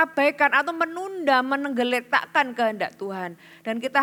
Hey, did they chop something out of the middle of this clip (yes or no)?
no